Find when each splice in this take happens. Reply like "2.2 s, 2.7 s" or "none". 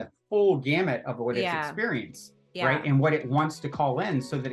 none